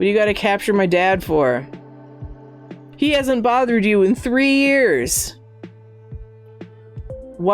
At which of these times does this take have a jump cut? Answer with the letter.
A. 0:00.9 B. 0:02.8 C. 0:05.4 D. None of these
B